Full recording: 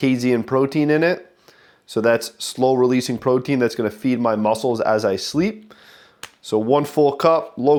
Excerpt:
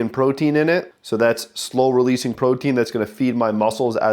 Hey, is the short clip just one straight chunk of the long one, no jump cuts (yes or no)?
no